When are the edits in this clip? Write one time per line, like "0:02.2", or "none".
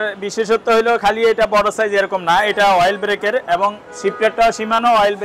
none